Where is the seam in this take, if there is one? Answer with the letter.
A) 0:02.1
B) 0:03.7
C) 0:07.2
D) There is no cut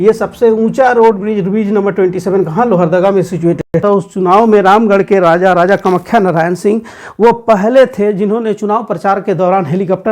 B